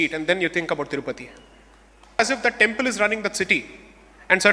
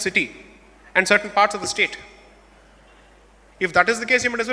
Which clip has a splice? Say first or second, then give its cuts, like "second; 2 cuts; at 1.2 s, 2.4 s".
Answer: first; 1 cut; at 2.2 s